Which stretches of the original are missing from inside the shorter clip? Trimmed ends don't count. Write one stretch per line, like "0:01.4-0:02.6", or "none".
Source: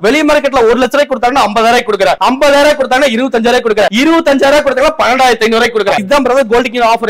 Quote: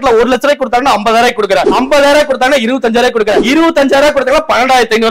none